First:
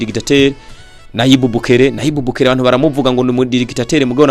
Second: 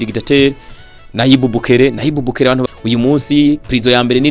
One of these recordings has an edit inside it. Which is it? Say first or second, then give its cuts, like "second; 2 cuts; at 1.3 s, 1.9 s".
second; 1 cut; at 2.6 s